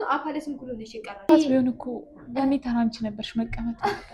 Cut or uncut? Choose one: uncut